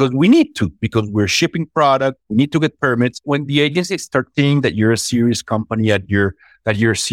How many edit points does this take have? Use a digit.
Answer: 2